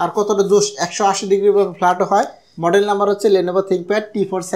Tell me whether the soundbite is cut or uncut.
uncut